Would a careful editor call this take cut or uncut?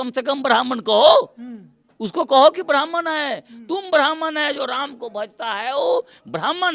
uncut